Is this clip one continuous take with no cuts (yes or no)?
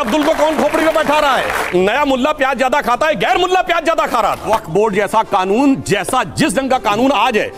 no